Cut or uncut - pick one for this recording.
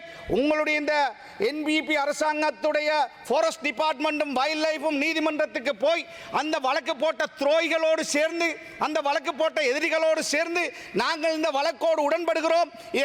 uncut